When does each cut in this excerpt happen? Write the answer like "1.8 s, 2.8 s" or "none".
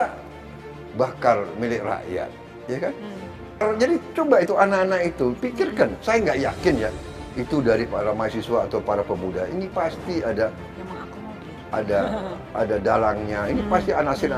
3.6 s